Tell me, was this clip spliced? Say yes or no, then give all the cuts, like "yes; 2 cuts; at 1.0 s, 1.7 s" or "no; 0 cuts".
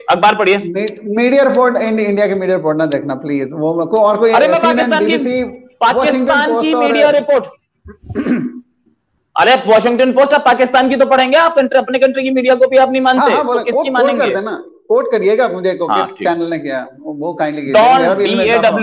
no; 0 cuts